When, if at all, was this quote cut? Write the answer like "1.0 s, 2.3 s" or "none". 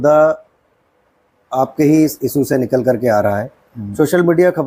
none

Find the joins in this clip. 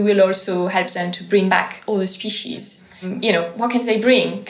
1.5 s, 3.1 s

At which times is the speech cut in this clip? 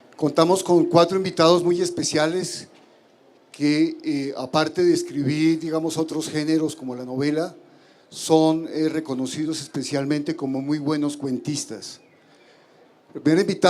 8.3 s

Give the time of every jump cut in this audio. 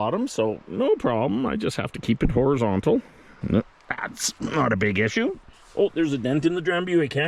none

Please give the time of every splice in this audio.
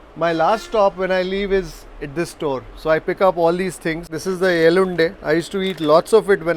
4.0 s

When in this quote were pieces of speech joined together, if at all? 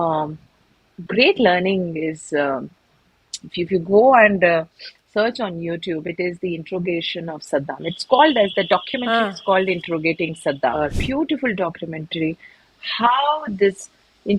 10.8 s

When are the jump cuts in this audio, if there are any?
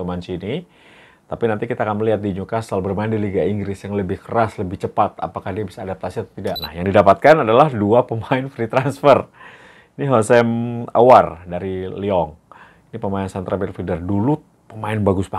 6.7 s

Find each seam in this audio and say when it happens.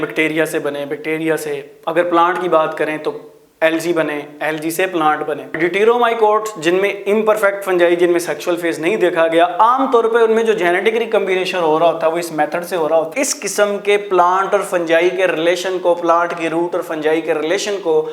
5.6 s, 13.1 s

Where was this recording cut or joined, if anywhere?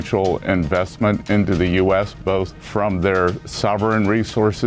1.2 s, 2.6 s, 3.5 s

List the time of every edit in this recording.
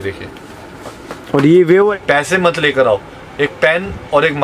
1.9 s

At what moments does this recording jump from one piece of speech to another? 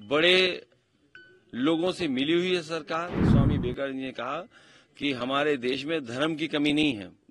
3.2 s

